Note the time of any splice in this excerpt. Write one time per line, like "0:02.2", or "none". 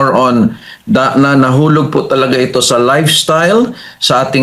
none